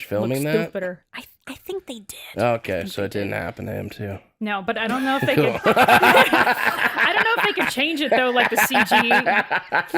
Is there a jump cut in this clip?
no; 0 cuts

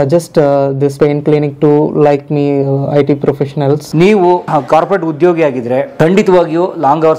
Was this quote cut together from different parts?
yes; 4 cuts; at 0.9 s, 3.9 s, 4.5 s, 5.9 s

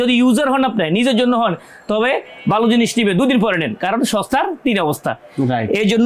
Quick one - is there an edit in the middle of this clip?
no; 0 cuts

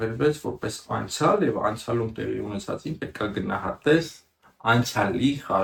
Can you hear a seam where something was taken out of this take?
no; 0 cuts

